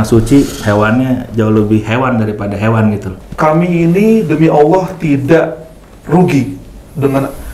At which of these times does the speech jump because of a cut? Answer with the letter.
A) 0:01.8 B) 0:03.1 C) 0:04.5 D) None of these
B